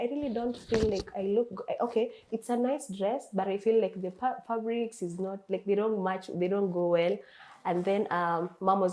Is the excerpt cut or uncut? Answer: uncut